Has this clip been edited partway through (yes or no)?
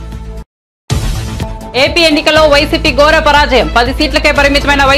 no